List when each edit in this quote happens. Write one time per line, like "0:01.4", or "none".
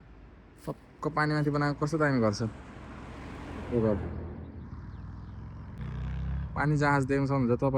0:05.8